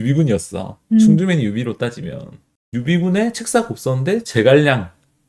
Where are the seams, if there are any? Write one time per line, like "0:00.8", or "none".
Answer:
none